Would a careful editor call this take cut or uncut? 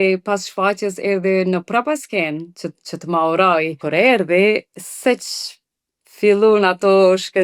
cut